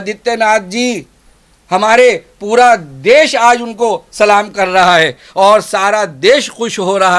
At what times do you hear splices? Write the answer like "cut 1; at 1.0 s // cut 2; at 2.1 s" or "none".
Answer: none